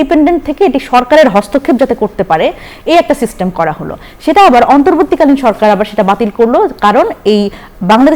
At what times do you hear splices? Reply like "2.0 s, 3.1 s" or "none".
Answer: none